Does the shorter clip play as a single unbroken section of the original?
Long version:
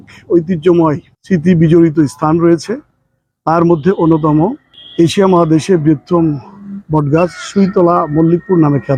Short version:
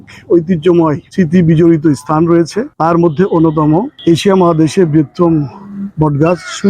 no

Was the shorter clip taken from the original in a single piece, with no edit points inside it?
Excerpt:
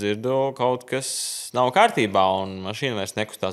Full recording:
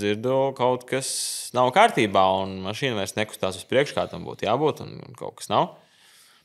yes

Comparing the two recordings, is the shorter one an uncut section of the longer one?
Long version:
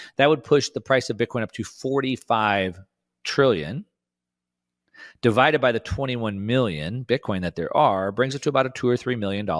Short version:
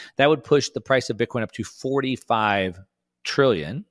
yes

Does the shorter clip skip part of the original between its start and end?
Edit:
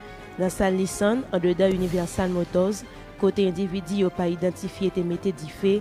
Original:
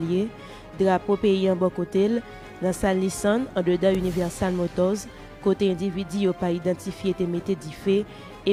no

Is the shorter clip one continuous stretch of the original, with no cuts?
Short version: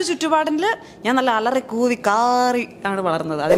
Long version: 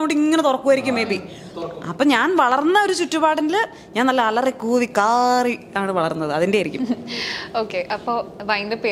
yes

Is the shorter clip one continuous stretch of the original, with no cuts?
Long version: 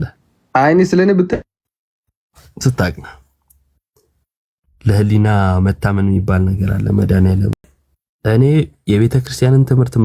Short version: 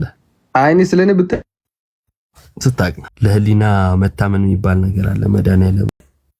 no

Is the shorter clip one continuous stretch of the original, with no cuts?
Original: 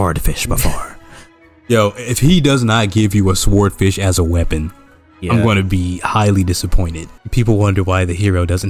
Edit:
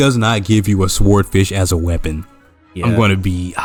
yes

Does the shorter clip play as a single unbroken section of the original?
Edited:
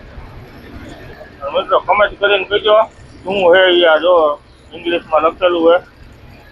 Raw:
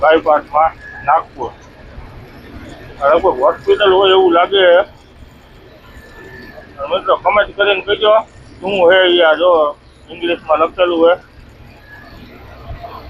no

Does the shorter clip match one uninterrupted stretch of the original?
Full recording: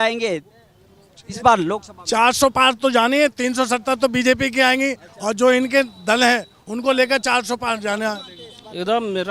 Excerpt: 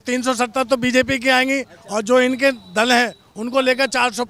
yes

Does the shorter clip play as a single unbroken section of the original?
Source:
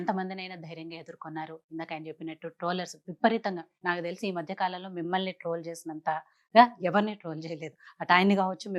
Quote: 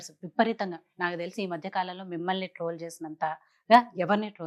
yes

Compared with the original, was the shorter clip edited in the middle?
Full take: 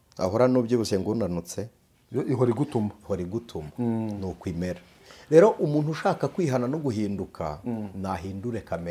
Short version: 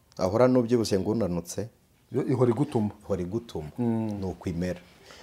no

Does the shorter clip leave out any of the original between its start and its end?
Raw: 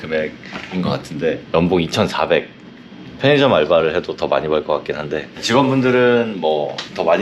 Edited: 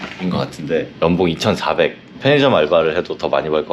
yes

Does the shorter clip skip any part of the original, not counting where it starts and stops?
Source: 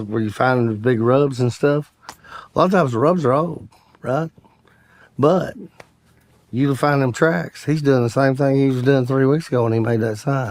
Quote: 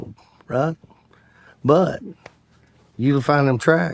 no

